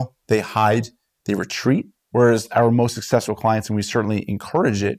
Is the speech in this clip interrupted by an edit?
yes; 1 cut; at 2.0 s

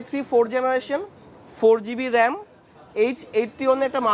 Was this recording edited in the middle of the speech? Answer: no; 0 cuts

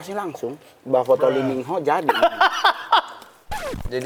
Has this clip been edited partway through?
no; 0 cuts

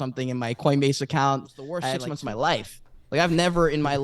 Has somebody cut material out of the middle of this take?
yes; 1 cut; at 1.9 s

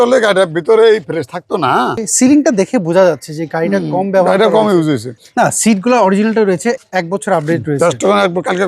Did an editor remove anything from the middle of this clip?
yes; 3 cuts; at 2.1 s, 5.2 s, 6.8 s

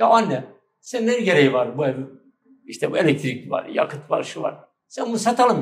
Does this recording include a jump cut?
no; 0 cuts

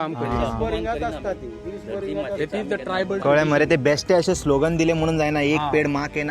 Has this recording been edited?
no; 0 cuts

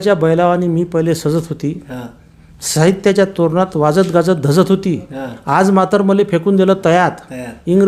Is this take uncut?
yes; 0 cuts

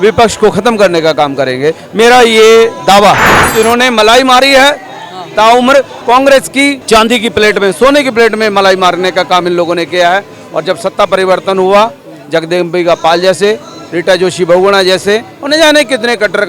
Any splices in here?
yes; 1 cut; at 3.4 s

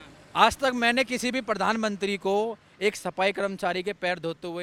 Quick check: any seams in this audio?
no; 0 cuts

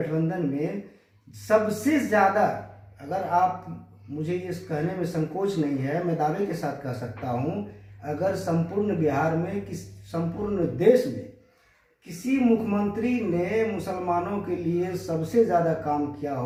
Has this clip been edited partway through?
no; 0 cuts

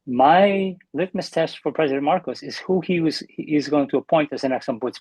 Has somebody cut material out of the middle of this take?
no; 0 cuts

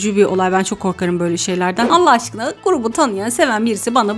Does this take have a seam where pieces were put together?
yes; 1 cut; at 1.9 s

